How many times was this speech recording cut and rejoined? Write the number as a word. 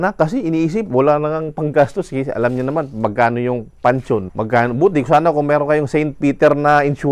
one